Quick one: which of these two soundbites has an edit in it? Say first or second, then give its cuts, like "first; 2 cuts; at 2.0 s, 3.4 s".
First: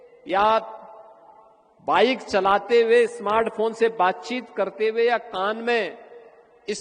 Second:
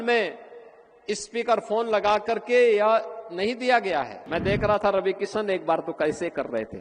second; 1 cut; at 4.2 s